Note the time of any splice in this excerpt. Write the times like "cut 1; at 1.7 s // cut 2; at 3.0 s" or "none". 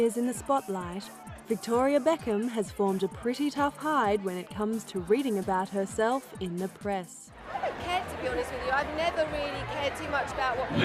cut 1; at 3.3 s